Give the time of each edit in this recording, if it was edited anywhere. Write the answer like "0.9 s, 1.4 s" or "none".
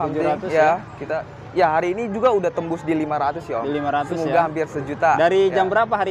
none

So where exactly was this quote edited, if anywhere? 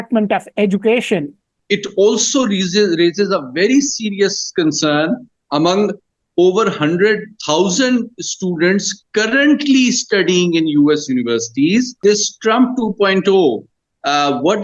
1.5 s, 12.0 s

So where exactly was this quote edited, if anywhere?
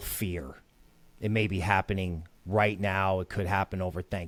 none

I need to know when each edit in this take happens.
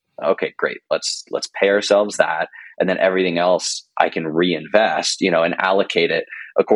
none

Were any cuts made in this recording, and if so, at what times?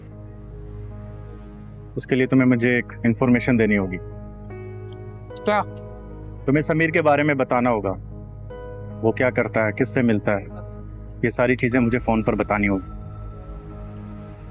none

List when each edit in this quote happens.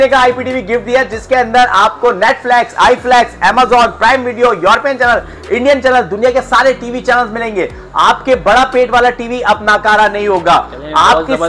none

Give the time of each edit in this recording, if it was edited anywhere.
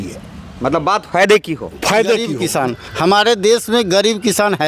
2.4 s

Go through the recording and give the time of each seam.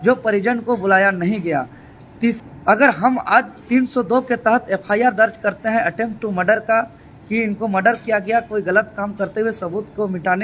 2.4 s

